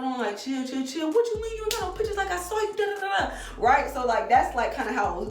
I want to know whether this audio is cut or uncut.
uncut